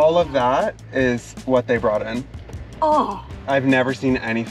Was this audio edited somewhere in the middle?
no; 0 cuts

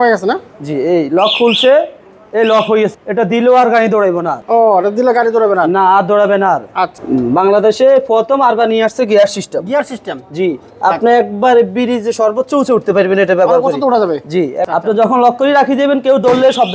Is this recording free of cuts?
no; 3 cuts; at 3.0 s, 7.0 s, 14.7 s

